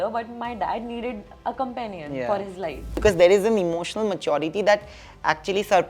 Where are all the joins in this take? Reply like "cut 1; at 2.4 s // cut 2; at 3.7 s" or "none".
cut 1; at 3.0 s